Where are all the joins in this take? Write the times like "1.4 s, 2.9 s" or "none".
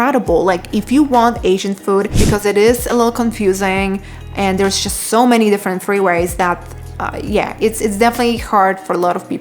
2.2 s